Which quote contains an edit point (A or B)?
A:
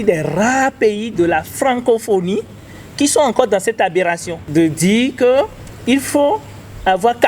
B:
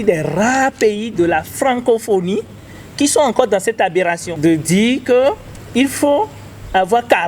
B